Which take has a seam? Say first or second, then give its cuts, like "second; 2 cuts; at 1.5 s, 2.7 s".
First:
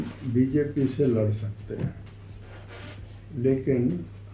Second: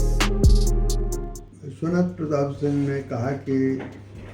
second; 1 cut; at 1.3 s